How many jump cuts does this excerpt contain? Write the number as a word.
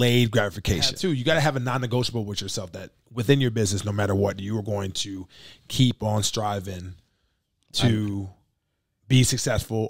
one